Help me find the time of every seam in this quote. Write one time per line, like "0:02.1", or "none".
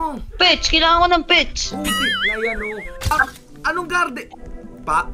0:03.1